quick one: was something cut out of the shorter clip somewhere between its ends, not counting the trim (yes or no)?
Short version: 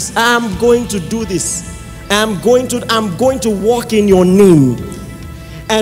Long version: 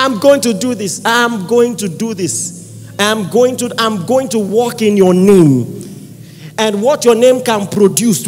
no